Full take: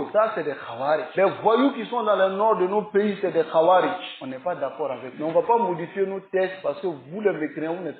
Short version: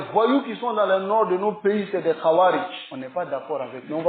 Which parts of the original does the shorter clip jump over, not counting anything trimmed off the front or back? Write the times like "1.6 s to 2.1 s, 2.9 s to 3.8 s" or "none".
none